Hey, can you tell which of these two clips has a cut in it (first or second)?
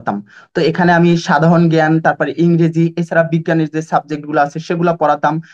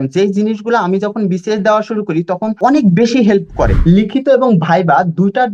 second